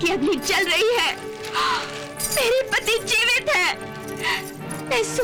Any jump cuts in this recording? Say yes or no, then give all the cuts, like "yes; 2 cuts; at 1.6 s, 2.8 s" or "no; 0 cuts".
no; 0 cuts